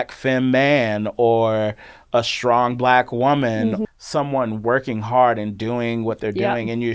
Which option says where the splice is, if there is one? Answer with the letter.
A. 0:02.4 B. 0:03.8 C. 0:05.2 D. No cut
B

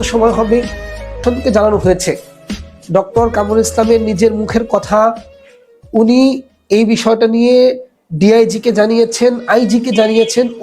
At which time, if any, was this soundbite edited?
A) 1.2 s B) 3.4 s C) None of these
A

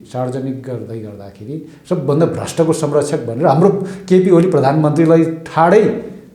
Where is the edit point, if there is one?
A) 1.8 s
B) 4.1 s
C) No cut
C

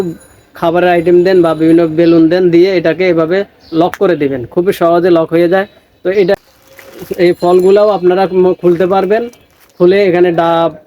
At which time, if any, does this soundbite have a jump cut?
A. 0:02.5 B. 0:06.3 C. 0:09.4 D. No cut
B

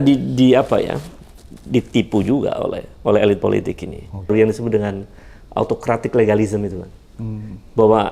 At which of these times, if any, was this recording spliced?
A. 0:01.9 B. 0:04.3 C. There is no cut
B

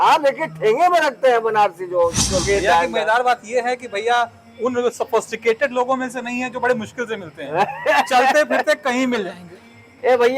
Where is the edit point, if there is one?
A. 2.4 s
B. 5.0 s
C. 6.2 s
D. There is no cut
A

